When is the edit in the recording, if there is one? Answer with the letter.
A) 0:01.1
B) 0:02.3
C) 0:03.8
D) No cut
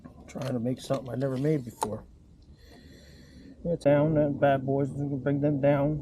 C